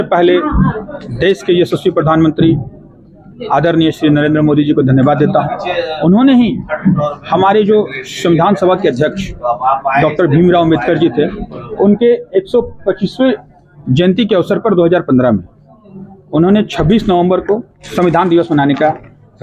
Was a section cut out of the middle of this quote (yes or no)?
no